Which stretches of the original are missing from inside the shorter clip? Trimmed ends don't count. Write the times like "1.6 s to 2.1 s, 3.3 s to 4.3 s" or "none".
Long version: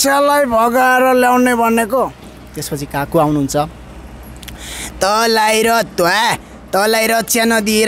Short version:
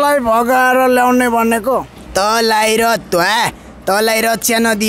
2.2 s to 4.8 s